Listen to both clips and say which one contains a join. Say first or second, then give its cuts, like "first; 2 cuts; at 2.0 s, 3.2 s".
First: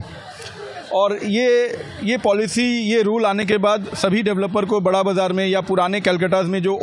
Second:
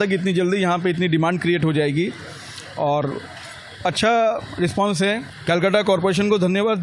second; 1 cut; at 5.2 s